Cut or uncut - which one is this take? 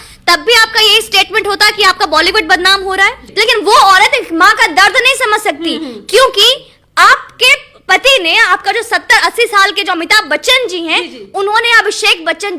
cut